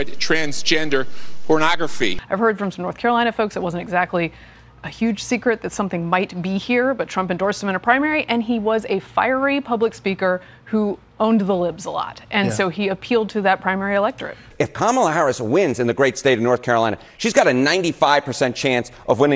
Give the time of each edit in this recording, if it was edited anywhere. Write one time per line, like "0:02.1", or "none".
0:02.2
0:14.4